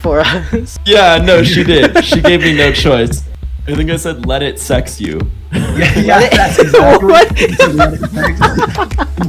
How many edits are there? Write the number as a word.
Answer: one